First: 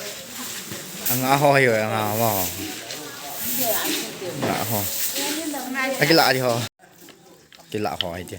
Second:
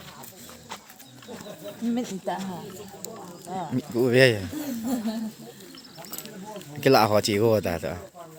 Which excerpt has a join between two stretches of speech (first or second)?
first